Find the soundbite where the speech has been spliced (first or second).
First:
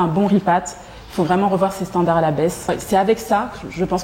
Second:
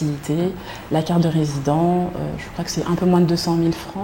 first